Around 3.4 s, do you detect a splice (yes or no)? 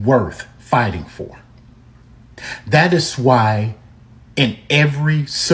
no